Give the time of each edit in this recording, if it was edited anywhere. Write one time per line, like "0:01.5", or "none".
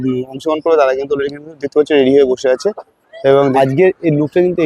0:03.5